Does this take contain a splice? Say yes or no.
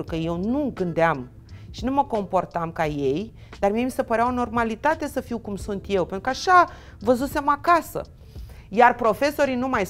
no